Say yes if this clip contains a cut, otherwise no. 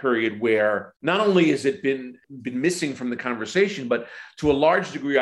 yes